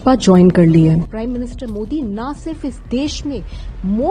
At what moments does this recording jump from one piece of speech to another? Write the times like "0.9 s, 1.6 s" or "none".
1.1 s